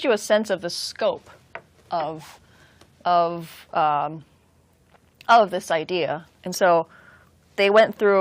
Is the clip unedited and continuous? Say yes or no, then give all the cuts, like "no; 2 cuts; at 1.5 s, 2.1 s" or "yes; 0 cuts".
yes; 0 cuts